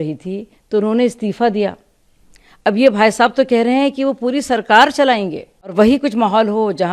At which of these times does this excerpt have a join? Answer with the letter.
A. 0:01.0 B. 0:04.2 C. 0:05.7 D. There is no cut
C